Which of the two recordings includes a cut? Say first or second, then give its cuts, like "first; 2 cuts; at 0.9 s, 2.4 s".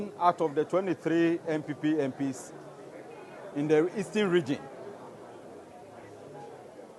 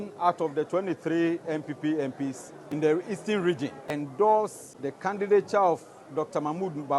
second; 3 cuts; at 2.5 s, 3.9 s, 5.2 s